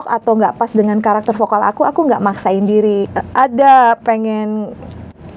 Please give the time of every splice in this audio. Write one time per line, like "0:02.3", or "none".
0:03.0